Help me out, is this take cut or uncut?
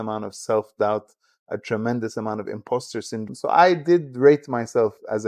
cut